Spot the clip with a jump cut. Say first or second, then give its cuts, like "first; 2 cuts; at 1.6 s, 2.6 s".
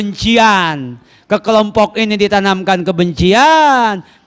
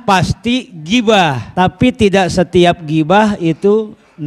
second; 1 cut; at 1.4 s